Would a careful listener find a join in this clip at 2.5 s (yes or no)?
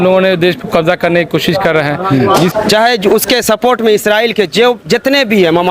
yes